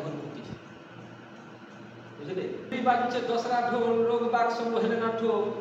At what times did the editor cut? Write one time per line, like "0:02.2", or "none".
0:02.7